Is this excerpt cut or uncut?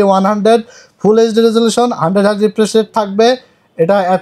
uncut